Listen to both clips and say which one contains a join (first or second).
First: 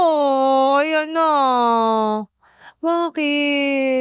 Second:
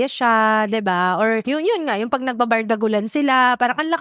first